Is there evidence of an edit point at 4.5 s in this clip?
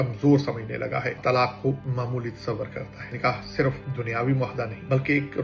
no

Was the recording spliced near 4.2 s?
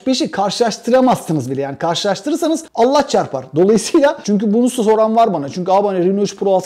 yes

